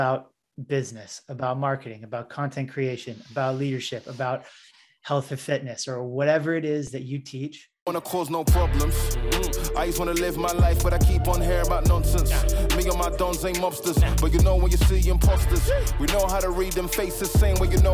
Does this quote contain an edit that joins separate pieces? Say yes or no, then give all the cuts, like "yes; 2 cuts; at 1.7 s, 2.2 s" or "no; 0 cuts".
yes; 1 cut; at 7.9 s